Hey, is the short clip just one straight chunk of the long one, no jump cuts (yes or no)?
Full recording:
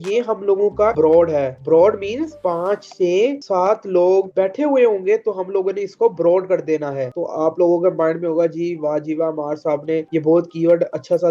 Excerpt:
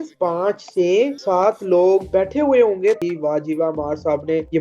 no